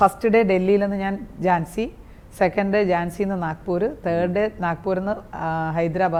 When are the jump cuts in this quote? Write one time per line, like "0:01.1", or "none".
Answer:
none